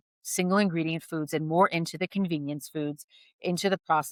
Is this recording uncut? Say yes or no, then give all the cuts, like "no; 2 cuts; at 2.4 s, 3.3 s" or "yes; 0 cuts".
yes; 0 cuts